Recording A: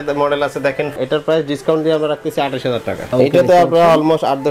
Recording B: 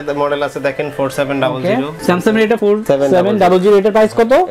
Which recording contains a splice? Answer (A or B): A